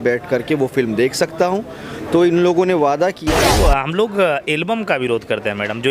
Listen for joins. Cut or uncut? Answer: cut